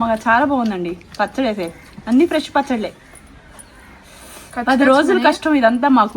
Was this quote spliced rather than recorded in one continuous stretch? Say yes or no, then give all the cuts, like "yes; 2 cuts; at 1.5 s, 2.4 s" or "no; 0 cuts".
no; 0 cuts